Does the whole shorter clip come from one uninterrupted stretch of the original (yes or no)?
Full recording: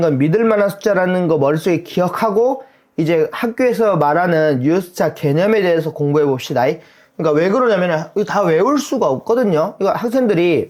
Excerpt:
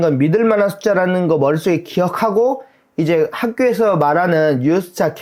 yes